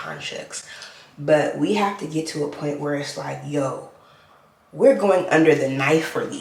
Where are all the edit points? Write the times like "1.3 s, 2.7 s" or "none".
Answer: none